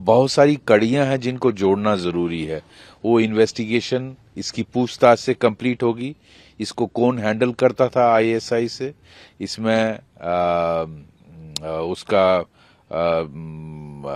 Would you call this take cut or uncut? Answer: uncut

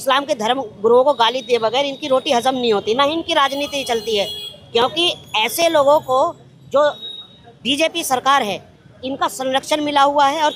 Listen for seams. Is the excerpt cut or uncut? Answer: uncut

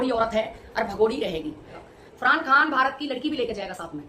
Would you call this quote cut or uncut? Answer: cut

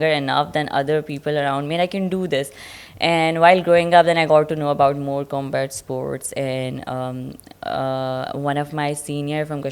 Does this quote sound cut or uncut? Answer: uncut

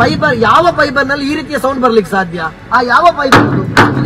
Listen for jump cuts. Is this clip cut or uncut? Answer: uncut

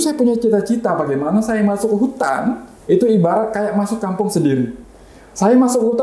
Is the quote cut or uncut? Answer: uncut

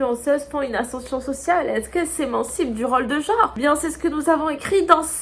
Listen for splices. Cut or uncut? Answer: cut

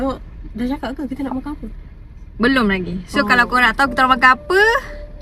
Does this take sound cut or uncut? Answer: uncut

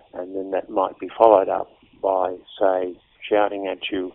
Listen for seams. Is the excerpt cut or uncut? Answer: uncut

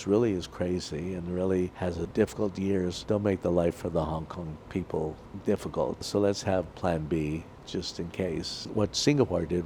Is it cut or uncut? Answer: cut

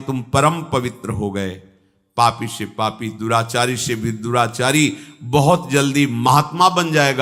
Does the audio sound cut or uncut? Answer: uncut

